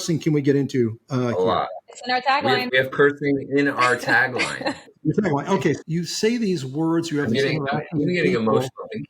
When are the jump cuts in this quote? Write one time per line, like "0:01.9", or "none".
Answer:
0:02.7
0:04.9
0:05.8